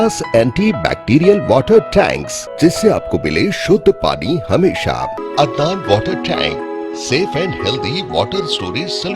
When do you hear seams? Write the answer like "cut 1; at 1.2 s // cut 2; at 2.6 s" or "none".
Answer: cut 1; at 2.4 s // cut 2; at 5.2 s